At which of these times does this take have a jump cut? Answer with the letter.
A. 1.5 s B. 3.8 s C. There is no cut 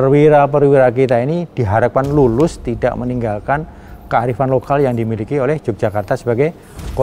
C